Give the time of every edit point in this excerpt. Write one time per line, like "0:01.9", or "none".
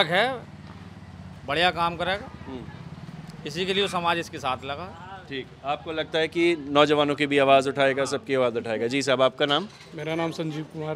none